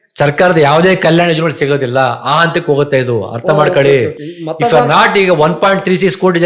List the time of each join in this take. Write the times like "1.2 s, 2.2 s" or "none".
none